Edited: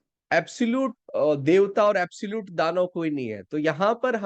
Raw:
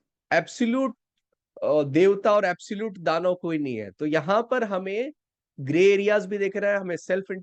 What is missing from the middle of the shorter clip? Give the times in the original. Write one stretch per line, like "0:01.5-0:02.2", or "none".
0:01.0-0:01.5

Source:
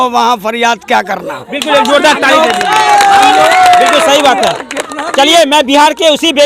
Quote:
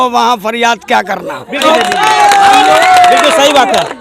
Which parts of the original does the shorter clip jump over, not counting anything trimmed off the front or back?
0:01.6-0:02.3

